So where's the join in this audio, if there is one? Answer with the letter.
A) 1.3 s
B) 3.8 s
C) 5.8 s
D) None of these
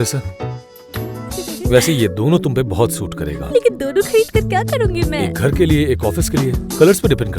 A